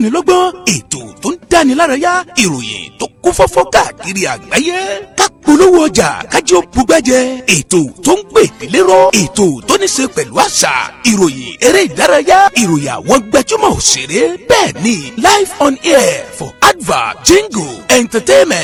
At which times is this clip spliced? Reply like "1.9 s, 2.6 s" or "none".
none